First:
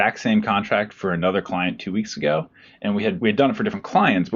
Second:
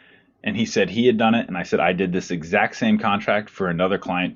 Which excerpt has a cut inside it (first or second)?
first